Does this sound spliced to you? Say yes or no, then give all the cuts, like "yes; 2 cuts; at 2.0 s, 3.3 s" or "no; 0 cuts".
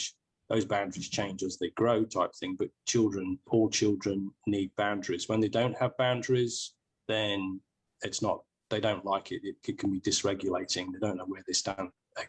yes; 2 cuts; at 3.5 s, 7.9 s